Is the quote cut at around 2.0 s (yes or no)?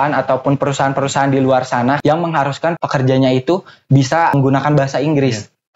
yes